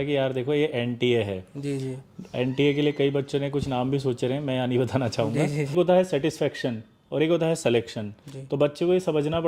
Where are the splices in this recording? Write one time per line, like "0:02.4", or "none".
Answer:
0:05.7